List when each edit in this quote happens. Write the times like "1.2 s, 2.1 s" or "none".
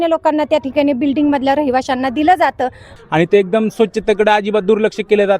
2.9 s